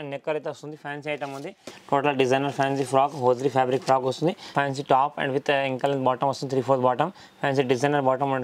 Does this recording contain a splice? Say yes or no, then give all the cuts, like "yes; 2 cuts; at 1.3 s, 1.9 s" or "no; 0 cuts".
yes; 2 cuts; at 1.7 s, 4.5 s